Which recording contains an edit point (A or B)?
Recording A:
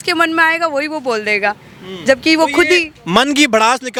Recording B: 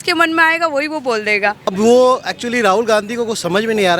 B